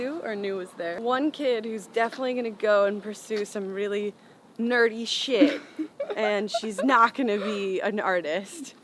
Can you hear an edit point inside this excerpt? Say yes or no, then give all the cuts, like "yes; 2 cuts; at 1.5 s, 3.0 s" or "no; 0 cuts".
yes; 1 cut; at 1.0 s